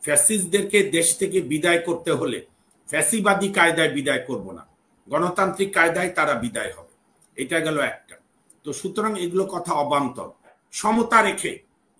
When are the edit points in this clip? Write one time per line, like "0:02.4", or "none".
0:10.6